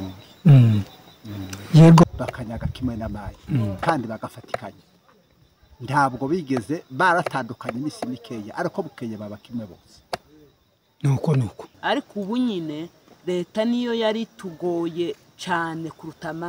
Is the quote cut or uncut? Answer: cut